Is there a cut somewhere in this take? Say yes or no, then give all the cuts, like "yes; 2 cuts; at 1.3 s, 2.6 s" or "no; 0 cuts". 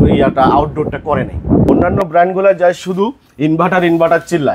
yes; 1 cut; at 1.9 s